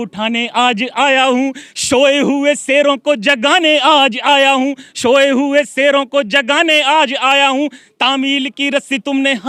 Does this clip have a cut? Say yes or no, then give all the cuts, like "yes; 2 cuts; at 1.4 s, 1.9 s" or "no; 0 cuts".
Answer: no; 0 cuts